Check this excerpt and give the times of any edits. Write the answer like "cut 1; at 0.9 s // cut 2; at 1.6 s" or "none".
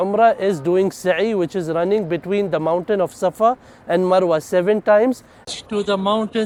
none